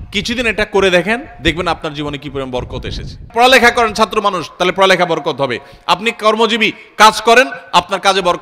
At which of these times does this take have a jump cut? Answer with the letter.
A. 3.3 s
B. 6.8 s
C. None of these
A